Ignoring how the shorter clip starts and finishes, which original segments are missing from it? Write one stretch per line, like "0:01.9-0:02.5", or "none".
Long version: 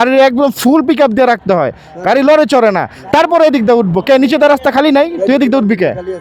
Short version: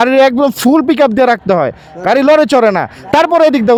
none

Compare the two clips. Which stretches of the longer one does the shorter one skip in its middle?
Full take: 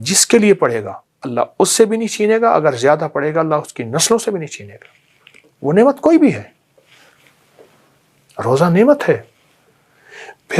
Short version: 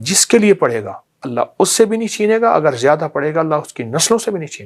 none

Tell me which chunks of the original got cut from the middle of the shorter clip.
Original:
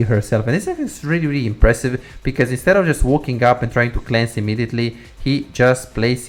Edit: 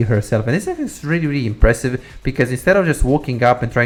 none

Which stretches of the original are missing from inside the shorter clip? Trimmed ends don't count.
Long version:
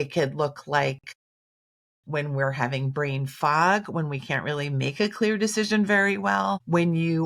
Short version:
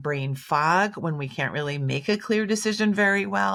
none

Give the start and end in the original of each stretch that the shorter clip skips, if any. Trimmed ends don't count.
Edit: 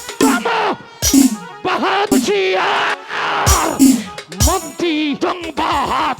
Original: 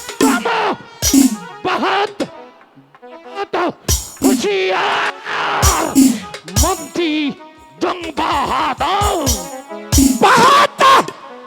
0:02.1-0:04.3
0:07.3-0:07.8

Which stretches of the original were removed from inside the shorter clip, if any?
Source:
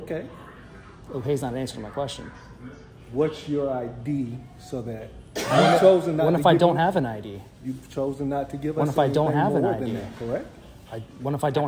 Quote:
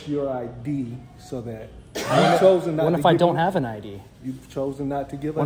none

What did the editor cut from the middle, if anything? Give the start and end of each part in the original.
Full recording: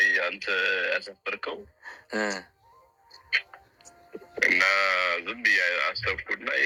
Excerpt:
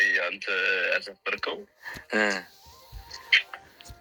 none

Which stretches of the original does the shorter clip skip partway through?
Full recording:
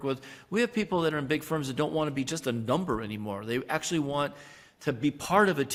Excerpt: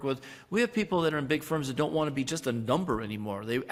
none

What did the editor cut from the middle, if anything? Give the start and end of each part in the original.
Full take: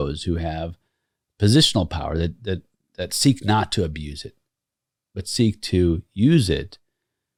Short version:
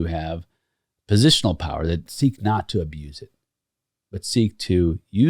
0:02.4-0:03.1

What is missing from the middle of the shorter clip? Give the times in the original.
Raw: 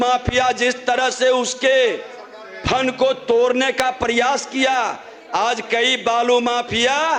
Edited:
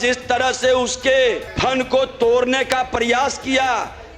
0:02.1-0:02.6

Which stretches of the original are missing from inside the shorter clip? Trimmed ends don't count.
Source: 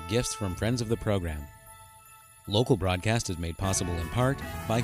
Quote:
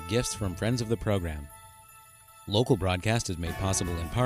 none

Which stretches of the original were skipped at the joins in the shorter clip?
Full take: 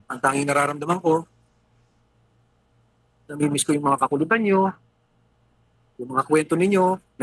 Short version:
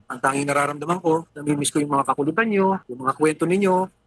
0:01.3-0:03.3
0:04.8-0:06.0

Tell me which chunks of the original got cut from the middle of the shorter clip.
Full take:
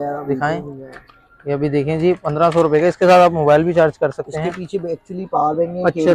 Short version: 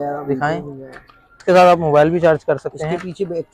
0:01.4-0:03.0

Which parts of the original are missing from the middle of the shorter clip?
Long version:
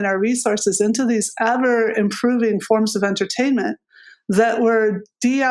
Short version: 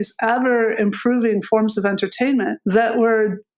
0:03.8-0:04.2

